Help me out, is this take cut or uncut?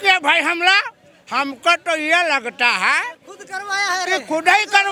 uncut